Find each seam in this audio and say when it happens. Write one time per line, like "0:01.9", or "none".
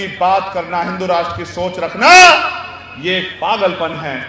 none